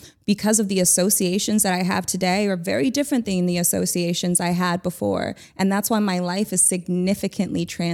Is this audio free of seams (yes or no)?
yes